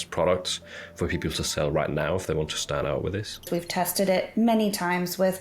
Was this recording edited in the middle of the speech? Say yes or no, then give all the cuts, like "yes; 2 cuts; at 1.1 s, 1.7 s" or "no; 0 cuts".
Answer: yes; 1 cut; at 3.5 s